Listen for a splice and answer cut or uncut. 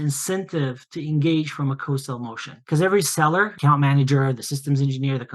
cut